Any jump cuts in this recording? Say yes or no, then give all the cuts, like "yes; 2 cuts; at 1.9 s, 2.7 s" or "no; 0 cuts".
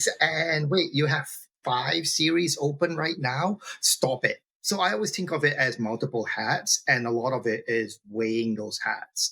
yes; 1 cut; at 4.5 s